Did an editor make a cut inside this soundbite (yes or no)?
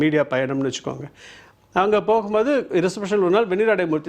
no